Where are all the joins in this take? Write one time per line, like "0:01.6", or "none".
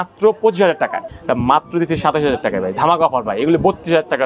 0:01.0